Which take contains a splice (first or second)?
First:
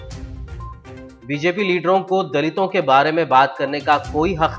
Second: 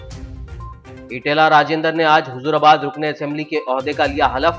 second